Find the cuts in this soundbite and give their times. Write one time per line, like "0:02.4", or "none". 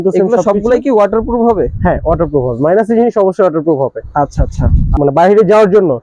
0:05.0

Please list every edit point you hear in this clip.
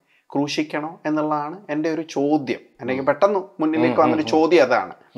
none

